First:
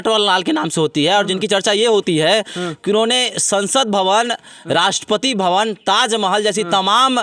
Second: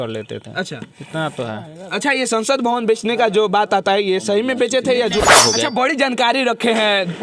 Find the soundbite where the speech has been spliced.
second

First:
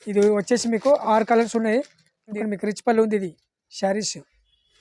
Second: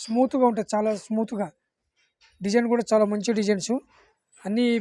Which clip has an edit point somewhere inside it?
first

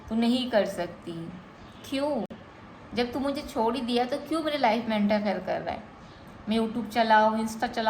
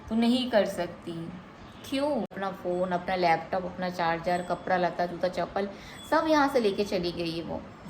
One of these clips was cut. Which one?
second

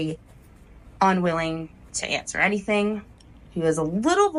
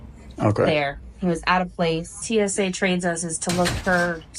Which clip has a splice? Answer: second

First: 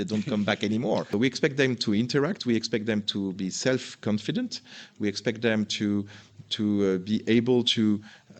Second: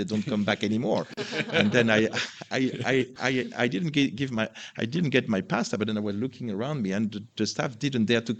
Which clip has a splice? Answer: first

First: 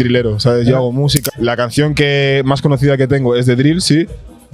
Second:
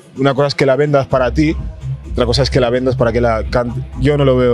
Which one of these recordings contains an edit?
first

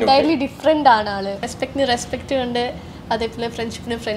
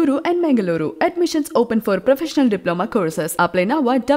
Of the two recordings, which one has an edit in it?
first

